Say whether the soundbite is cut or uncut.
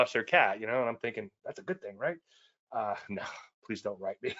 uncut